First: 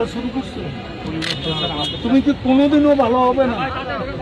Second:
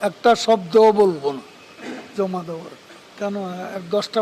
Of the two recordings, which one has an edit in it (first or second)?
second